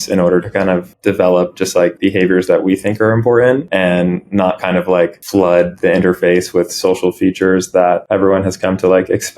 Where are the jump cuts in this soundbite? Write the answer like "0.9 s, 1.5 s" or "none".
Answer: 0.9 s, 2.0 s, 3.7 s, 5.2 s, 8.0 s